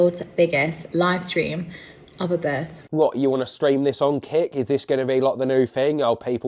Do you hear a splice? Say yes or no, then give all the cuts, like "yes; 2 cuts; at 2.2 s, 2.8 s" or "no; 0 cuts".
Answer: yes; 1 cut; at 2.9 s